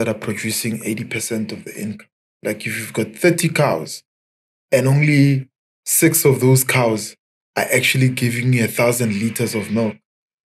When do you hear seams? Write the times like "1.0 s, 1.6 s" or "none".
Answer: none